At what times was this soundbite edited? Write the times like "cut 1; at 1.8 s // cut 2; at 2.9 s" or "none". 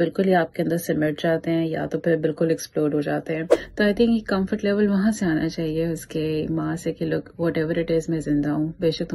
cut 1; at 3.6 s